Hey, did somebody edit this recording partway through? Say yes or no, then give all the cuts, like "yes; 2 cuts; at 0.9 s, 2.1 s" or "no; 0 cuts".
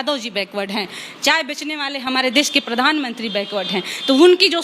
no; 0 cuts